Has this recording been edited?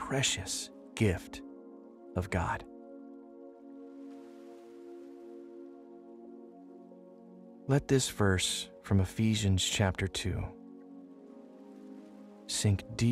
yes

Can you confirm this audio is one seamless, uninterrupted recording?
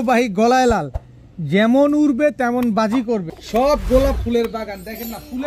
no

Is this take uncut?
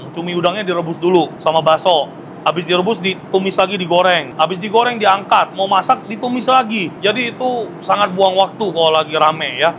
yes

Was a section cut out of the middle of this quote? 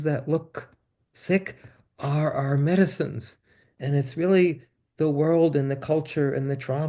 no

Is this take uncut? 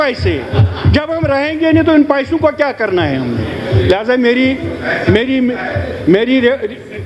yes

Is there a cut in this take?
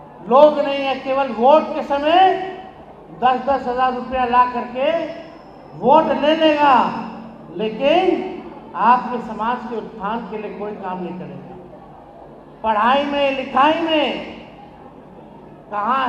no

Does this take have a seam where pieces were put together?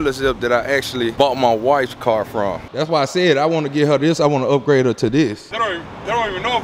yes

